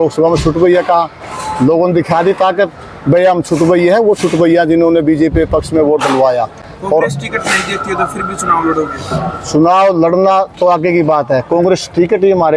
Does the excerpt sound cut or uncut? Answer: uncut